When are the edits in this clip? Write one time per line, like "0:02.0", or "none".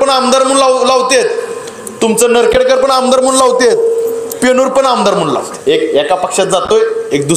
0:05.5